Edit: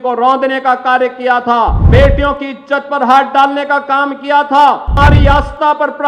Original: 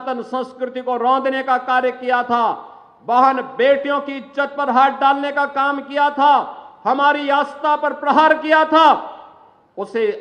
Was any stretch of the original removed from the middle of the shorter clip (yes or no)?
yes